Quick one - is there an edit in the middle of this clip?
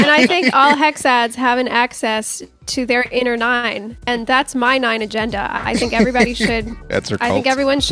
no; 0 cuts

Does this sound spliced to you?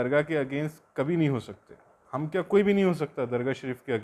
no; 0 cuts

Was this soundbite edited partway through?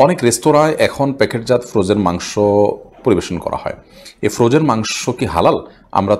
no; 0 cuts

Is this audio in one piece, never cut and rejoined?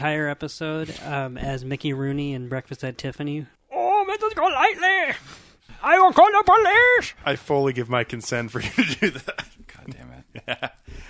no; 2 cuts; at 3.6 s, 5.7 s

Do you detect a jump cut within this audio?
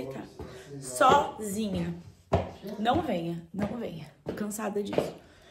no; 0 cuts

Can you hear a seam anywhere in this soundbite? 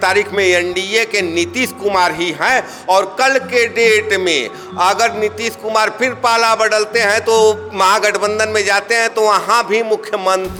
no; 0 cuts

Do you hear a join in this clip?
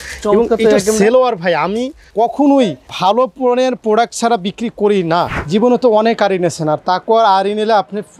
yes; 3 cuts; at 2.0 s, 2.8 s, 5.4 s

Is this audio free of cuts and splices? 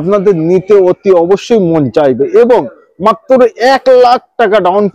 yes; 0 cuts

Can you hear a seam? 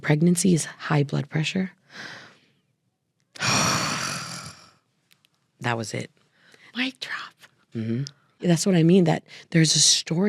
yes; 1 cut; at 8.4 s

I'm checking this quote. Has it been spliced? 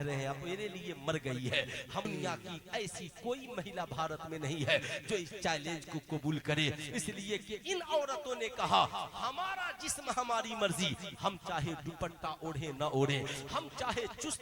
yes; 1 cut; at 2.0 s

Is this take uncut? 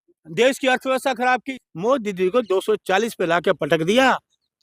no; 1 cut; at 1.5 s

